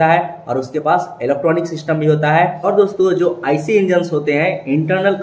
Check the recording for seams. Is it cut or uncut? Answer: cut